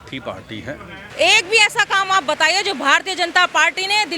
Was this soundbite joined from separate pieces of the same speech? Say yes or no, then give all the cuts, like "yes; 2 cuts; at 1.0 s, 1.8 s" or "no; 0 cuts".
yes; 1 cut; at 1.0 s